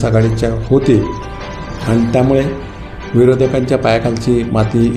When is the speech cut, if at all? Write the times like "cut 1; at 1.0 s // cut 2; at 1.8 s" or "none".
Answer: none